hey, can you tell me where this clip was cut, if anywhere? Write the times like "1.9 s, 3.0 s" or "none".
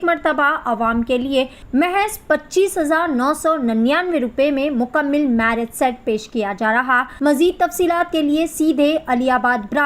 1.6 s, 7.1 s